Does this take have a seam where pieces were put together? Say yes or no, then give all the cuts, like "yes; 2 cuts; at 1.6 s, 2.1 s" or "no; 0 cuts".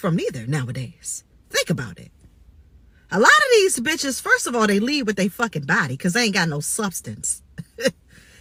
no; 0 cuts